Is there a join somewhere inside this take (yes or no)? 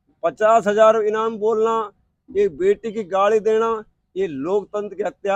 no